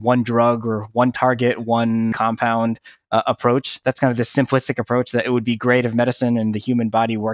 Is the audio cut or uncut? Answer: cut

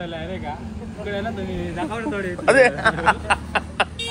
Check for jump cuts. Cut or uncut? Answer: uncut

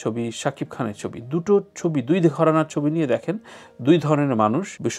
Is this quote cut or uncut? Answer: uncut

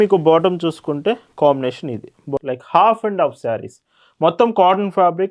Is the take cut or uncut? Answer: cut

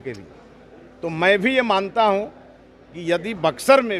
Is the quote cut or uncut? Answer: uncut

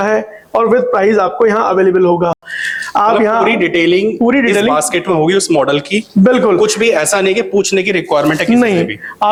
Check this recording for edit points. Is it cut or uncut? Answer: uncut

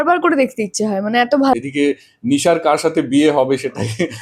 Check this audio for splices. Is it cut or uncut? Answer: cut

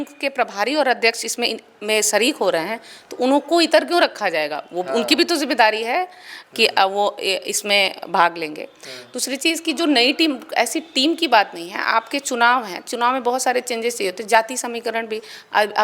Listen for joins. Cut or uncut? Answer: uncut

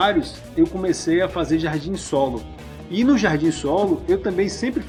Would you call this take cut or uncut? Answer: uncut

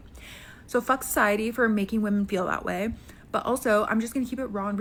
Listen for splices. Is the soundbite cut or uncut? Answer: uncut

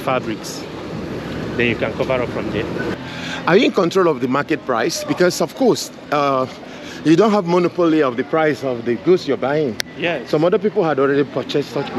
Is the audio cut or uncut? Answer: cut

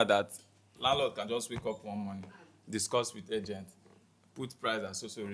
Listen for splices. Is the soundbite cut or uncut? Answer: uncut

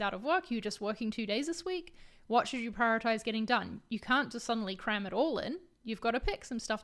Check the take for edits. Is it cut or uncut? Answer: uncut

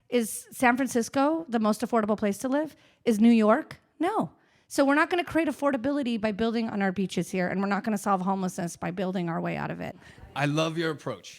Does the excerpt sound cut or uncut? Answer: cut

